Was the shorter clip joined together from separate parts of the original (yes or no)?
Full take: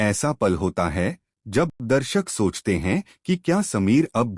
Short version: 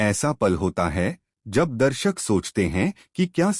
yes